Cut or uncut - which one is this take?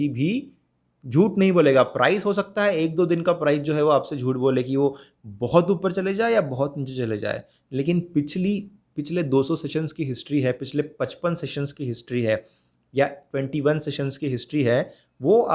uncut